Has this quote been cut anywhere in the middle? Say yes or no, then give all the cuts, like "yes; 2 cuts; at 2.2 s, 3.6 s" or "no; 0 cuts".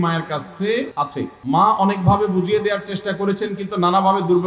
yes; 1 cut; at 1.1 s